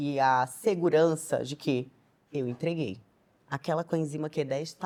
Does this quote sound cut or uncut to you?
uncut